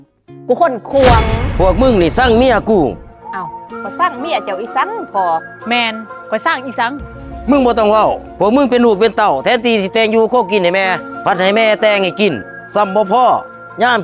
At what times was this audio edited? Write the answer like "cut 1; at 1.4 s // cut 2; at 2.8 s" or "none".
cut 1; at 1.4 s